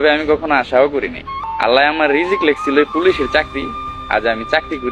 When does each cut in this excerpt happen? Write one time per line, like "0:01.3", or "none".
0:01.5